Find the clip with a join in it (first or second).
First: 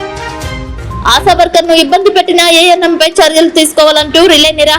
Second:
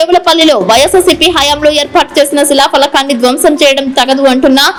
first